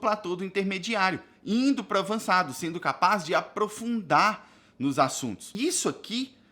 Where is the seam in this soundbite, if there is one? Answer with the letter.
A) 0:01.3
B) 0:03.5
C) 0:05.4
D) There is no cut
C